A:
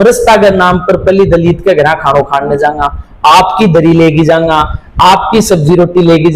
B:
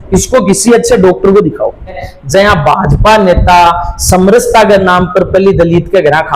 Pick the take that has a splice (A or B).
B